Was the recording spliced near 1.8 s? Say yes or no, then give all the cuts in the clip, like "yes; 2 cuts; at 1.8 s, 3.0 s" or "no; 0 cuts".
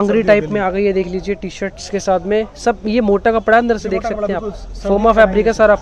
no; 0 cuts